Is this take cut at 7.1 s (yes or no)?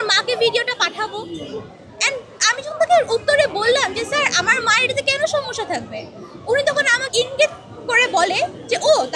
yes